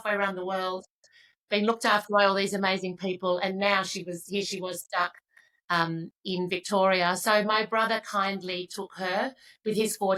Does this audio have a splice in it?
no; 0 cuts

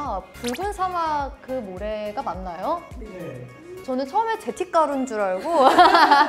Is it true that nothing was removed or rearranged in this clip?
no; 1 cut; at 3.7 s

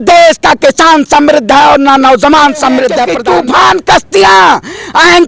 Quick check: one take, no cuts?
no; 1 cut; at 3.1 s

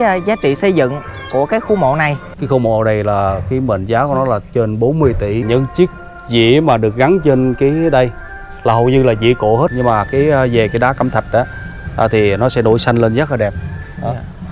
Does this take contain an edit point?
yes; 3 cuts; at 2.3 s, 5.4 s, 9.7 s

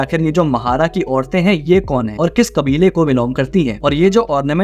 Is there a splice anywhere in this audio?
no; 0 cuts

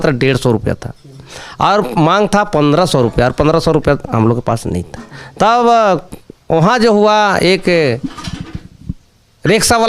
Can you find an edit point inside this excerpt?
no; 0 cuts

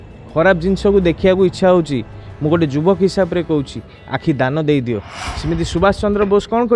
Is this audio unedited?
no; 1 cut; at 5.2 s

